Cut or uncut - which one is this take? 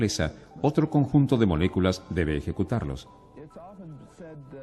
cut